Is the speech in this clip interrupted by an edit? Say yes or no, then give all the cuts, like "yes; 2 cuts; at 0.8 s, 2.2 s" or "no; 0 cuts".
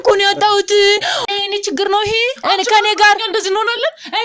yes; 1 cut; at 1.3 s